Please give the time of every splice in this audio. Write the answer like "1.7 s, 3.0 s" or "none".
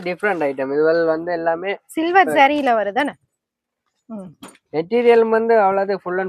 none